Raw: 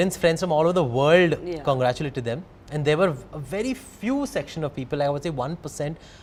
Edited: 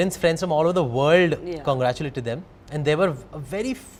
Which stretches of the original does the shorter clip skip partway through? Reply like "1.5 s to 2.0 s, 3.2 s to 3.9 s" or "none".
none

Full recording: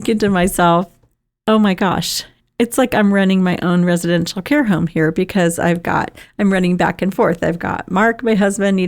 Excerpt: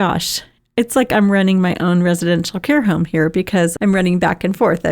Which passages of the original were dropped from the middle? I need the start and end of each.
5.6 s to 6.3 s

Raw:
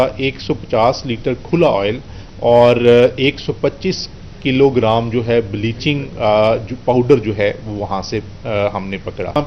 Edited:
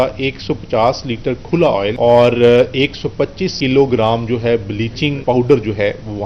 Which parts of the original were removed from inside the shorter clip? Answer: 1.9 s to 2.4 s, 3.9 s to 4.3 s, 6.0 s to 6.8 s

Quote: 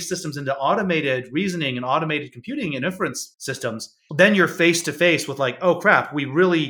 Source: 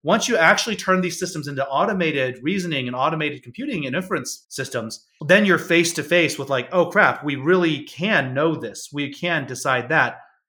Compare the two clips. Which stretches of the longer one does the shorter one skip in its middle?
none

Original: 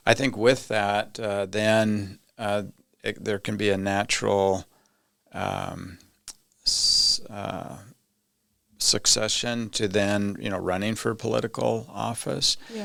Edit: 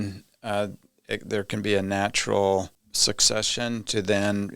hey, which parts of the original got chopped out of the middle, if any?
4.8 s to 8.7 s

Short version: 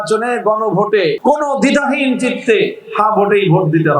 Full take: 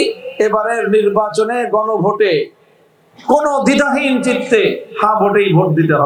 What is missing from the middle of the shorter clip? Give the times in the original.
2.5 s to 3.2 s

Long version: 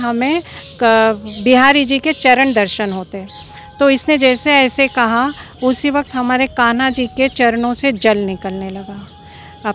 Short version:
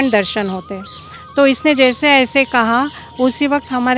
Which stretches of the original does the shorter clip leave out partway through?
none

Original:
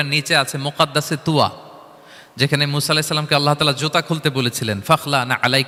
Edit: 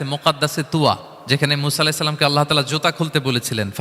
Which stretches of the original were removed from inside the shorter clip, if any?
1.7 s to 2.2 s

